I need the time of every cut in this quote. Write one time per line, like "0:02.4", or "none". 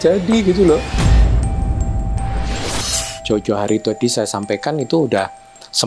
0:00.9